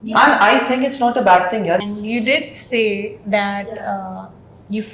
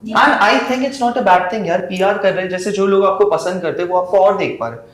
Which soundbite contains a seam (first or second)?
first